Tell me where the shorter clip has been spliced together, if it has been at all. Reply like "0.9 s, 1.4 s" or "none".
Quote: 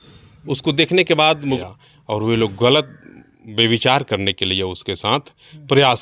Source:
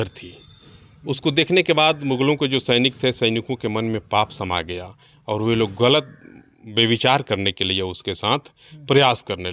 1.6 s